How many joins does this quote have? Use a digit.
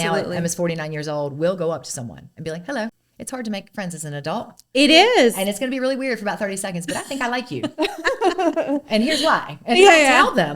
1